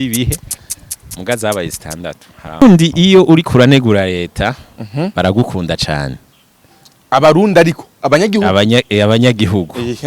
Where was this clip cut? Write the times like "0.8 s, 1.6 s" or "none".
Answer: 2.6 s